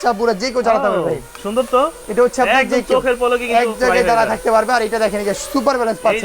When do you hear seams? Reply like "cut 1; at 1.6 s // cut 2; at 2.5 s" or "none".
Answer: none